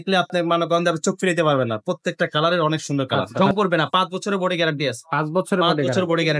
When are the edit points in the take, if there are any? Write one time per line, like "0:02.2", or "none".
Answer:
0:03.2